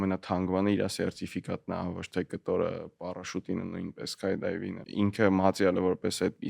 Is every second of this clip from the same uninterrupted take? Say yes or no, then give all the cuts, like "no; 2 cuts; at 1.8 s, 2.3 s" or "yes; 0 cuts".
no; 1 cut; at 4.8 s